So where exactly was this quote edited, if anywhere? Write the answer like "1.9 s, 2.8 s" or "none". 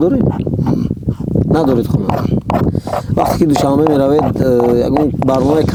none